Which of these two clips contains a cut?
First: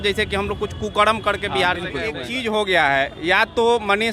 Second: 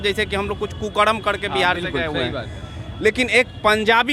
first; 1 cut; at 2.3 s

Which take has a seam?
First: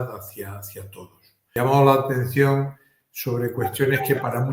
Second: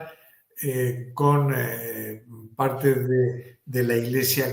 first; 1 cut; at 1.4 s

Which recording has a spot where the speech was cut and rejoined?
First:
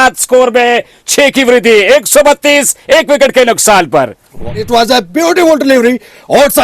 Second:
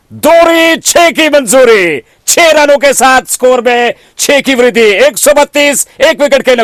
first; 1 cut; at 4.7 s

